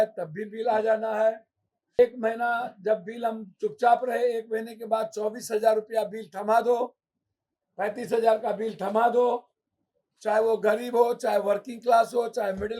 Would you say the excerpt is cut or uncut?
cut